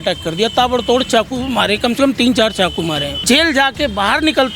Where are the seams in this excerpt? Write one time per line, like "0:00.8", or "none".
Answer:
0:03.1